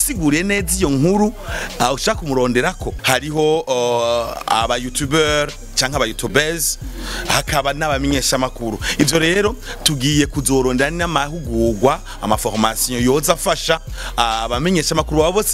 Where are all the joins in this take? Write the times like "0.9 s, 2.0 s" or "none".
2.9 s